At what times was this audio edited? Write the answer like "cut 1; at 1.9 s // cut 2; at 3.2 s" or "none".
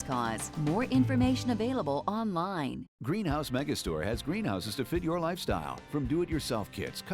cut 1; at 2.9 s